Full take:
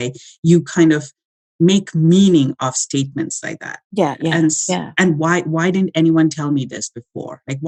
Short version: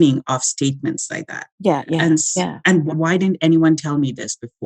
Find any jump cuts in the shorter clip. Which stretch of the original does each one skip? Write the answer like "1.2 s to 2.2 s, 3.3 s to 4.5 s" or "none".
5.2 s to 5.4 s